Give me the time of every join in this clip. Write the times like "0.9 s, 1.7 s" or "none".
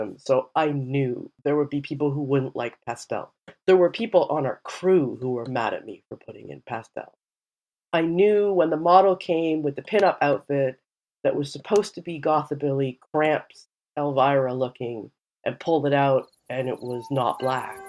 1.3 s